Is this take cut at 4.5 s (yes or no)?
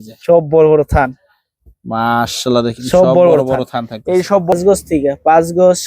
yes